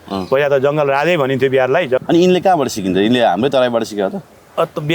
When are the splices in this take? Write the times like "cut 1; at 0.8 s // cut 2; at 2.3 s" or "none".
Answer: cut 1; at 2.0 s